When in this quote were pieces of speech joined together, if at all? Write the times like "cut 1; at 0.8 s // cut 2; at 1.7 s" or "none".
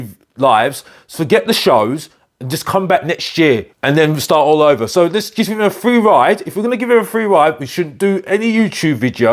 cut 1; at 3.7 s